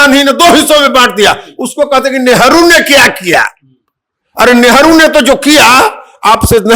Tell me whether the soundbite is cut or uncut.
uncut